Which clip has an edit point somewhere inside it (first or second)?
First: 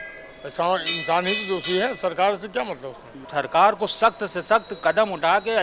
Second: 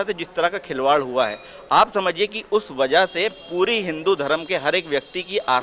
first